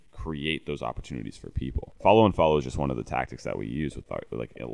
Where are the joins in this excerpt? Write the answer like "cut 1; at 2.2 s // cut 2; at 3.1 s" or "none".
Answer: cut 1; at 1.9 s